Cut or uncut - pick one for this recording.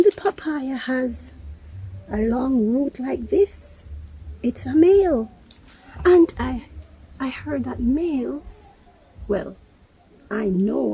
uncut